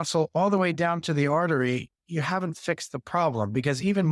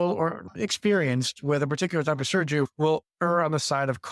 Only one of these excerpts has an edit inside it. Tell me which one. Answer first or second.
second